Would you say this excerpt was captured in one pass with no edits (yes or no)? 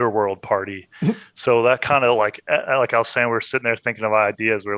yes